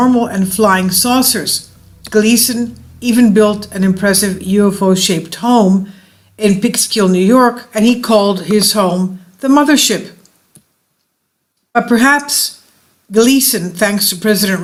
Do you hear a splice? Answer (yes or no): no